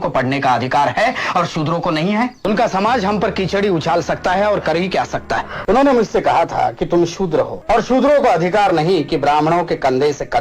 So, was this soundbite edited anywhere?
yes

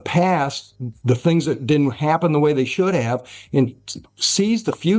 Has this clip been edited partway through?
no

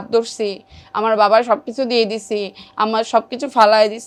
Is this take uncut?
yes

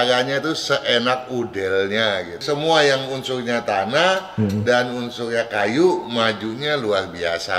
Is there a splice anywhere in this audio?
yes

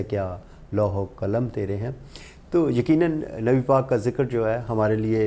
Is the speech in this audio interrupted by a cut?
no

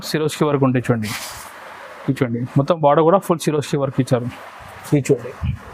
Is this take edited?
no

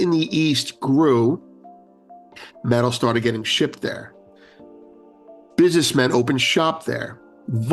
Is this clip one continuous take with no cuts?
yes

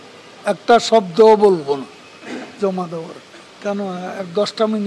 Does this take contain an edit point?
yes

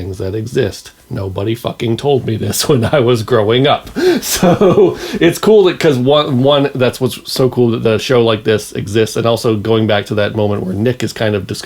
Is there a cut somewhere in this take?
no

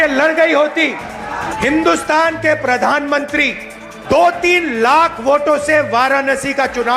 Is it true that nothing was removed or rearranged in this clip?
no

